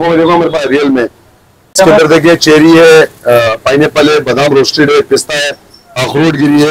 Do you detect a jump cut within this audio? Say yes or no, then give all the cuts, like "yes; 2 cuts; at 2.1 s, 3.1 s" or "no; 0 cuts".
yes; 1 cut; at 1.8 s